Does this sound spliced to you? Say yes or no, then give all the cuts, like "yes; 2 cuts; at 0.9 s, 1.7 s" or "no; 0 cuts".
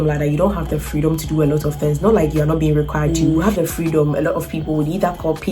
yes; 1 cut; at 3.1 s